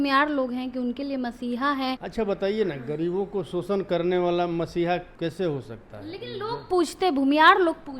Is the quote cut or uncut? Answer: cut